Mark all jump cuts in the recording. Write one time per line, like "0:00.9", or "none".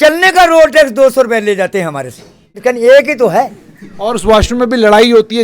0:02.6